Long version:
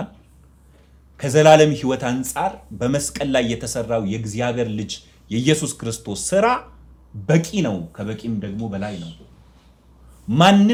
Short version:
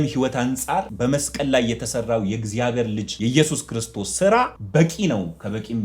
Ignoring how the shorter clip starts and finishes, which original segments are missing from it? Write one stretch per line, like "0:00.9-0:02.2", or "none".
0:02.6-0:02.7
0:04.9-0:05.2
0:06.7-0:07.1

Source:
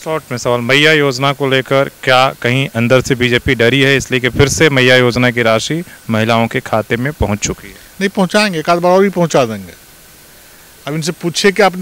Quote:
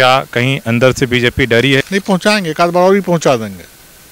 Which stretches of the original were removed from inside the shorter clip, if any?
0:03.9-0:07.9

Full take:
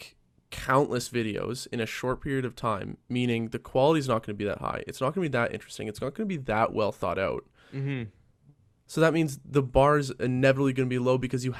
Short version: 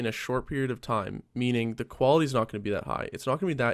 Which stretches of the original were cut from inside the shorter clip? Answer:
none

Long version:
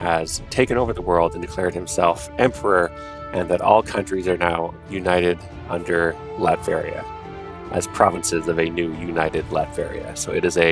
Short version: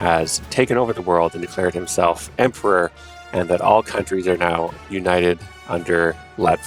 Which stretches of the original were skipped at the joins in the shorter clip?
none

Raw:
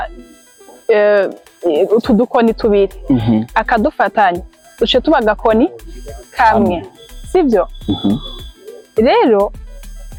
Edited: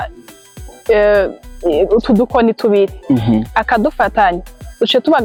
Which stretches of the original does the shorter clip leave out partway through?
none

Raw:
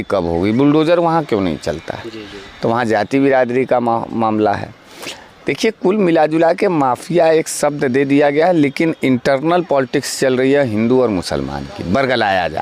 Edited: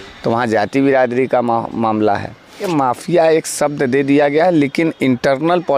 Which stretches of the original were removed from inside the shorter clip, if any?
0:05.0-0:06.6

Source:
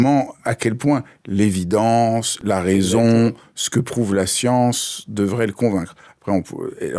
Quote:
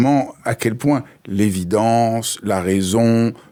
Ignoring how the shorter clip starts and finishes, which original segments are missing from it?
none

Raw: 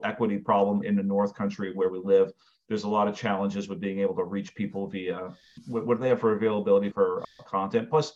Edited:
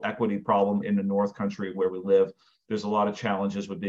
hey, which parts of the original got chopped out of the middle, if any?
none

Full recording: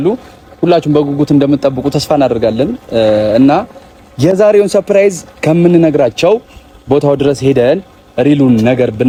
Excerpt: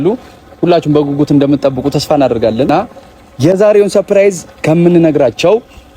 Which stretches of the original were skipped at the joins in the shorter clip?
0:02.7-0:03.5

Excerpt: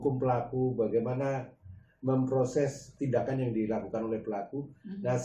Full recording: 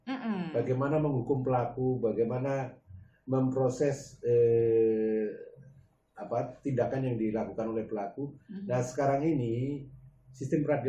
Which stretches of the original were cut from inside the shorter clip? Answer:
0:04.1-0:06.5

